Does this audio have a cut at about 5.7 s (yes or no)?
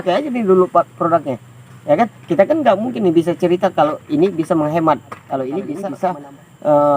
yes